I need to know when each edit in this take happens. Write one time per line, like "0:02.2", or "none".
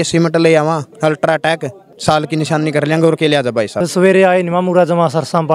0:00.9
0:01.9
0:03.8